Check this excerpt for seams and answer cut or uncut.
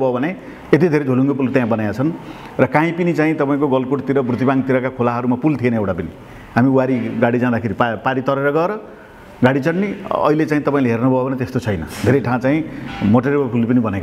uncut